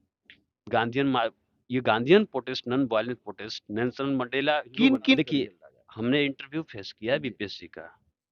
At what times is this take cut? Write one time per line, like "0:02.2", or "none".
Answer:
0:05.1